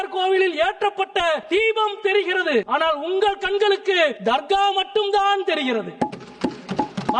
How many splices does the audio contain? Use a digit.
3